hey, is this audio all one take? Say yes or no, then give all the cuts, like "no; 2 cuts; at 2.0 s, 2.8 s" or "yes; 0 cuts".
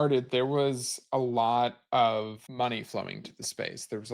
no; 1 cut; at 2.4 s